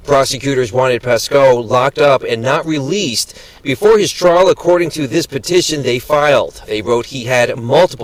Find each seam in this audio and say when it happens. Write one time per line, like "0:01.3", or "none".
none

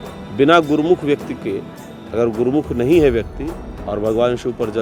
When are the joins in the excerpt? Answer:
none

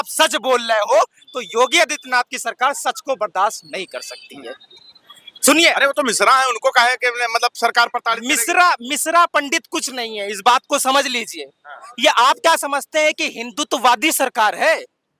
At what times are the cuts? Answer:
none

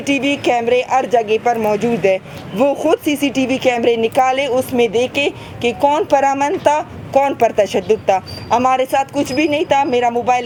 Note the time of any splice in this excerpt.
none

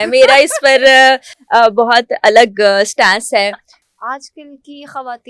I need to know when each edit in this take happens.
0:03.7

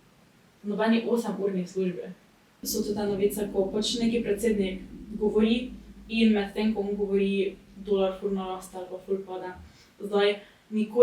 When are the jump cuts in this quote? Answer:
0:02.6

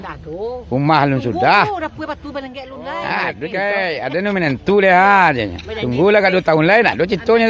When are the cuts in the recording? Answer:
0:03.4

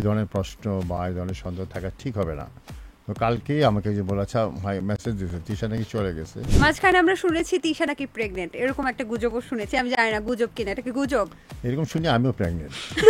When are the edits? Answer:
0:06.4

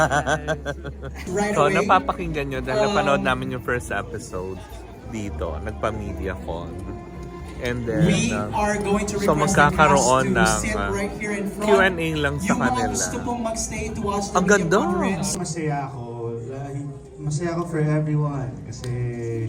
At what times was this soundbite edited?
none

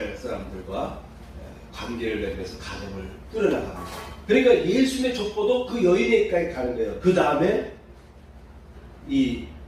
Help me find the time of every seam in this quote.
none

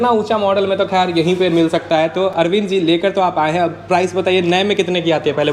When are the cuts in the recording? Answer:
none

